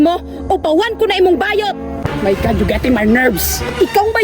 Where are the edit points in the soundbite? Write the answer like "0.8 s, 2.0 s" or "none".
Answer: 2.0 s